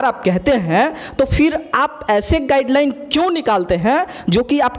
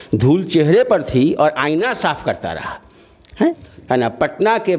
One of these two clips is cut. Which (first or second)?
second